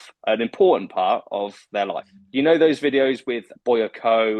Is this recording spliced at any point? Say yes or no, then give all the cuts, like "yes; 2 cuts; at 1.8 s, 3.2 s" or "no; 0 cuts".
yes; 2 cuts; at 2.1 s, 3.5 s